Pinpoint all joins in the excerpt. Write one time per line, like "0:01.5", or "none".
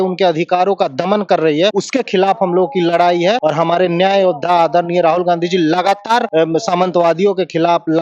0:01.8
0:03.4
0:06.3